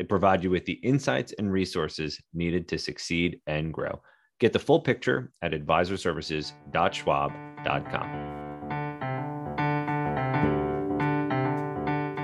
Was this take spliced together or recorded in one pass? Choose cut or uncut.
cut